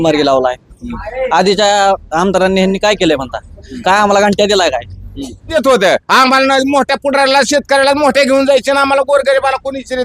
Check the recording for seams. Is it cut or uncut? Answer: cut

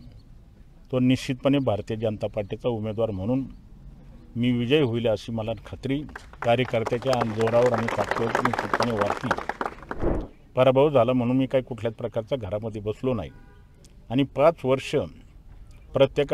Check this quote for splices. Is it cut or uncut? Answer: cut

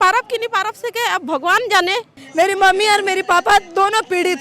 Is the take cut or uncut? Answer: cut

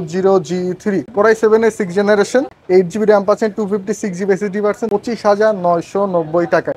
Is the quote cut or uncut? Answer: cut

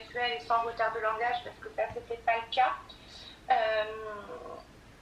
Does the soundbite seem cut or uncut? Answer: uncut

